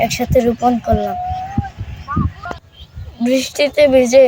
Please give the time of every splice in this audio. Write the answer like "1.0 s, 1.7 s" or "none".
2.4 s